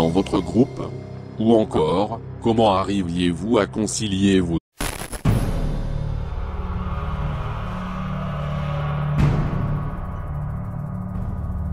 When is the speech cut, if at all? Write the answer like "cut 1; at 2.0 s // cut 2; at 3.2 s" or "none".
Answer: none

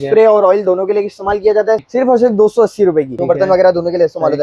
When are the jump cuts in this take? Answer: cut 1; at 1.8 s // cut 2; at 3.2 s

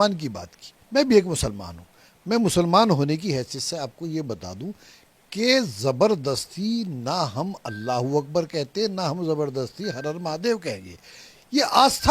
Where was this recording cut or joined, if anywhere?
none

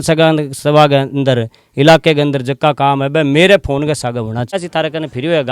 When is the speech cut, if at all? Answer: cut 1; at 4.6 s

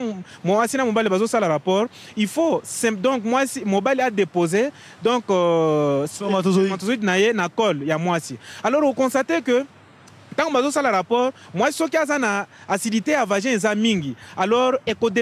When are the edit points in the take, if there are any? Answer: none

